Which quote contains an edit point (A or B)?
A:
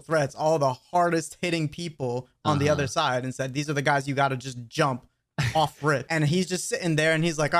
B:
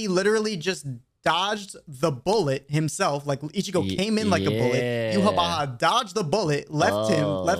A